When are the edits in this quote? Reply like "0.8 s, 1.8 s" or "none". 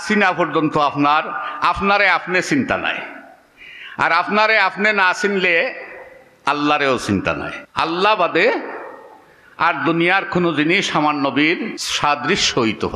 7.6 s, 11.8 s